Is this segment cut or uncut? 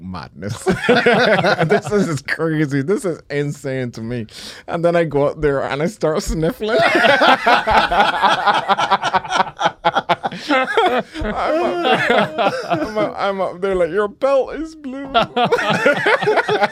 uncut